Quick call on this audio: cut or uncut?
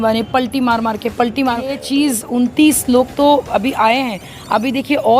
cut